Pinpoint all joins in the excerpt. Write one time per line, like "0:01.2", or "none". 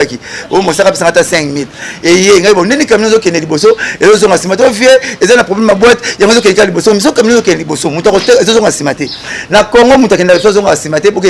none